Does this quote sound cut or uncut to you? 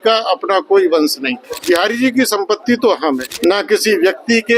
cut